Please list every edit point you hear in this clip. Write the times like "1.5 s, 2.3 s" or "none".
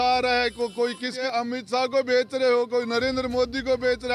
1.2 s